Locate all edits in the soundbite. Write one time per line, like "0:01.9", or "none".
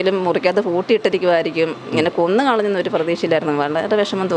none